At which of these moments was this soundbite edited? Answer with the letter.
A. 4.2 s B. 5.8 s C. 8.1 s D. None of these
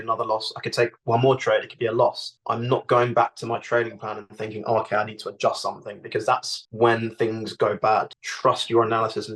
C